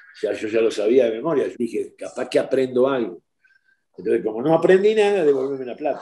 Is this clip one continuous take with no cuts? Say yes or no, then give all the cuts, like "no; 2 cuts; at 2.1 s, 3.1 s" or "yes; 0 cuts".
no; 1 cut; at 1.5 s